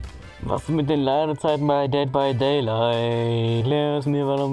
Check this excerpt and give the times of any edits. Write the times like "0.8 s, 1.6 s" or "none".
3.6 s